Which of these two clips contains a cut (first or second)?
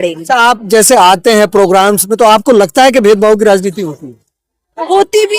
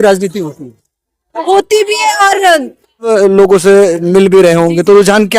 second